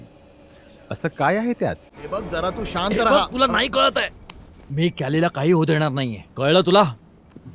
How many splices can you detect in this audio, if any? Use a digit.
1